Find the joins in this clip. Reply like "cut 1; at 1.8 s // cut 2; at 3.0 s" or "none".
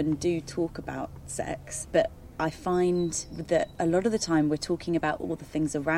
cut 1; at 1.7 s // cut 2; at 3.3 s